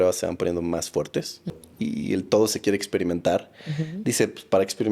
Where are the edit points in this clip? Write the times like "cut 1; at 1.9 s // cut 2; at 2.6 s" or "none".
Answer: cut 1; at 1.6 s